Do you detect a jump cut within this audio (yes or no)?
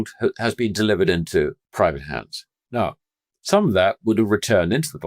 yes